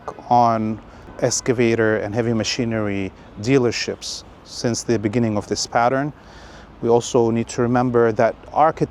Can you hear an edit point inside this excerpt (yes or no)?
yes